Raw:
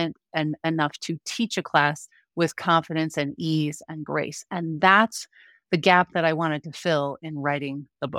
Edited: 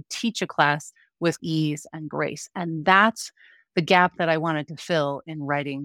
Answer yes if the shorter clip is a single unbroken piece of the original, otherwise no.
no